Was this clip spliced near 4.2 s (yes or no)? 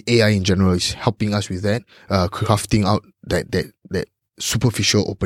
no